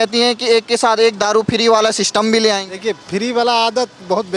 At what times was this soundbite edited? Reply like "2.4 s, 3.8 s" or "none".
none